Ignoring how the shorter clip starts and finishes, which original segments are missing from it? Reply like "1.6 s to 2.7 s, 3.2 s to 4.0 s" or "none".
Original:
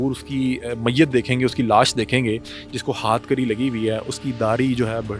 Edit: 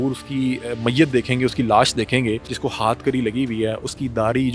2.5 s to 2.7 s